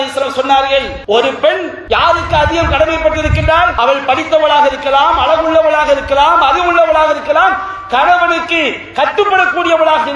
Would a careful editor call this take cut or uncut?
cut